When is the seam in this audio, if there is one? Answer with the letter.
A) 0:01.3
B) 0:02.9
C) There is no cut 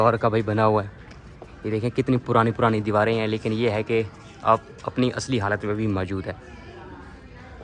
C